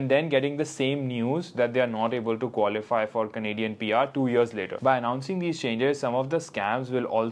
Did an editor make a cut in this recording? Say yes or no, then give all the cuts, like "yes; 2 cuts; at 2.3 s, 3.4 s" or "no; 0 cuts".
yes; 1 cut; at 4.7 s